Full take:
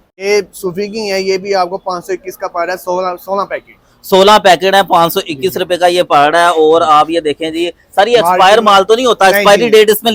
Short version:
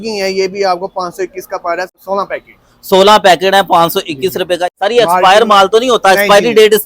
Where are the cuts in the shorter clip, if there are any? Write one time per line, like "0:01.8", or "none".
0:01.9
0:04.6